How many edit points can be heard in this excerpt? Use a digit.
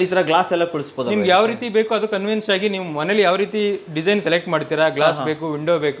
0